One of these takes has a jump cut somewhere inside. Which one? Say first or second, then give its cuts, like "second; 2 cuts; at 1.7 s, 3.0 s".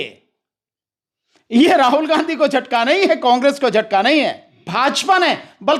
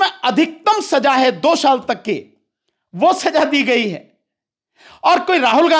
first; 1 cut; at 4.6 s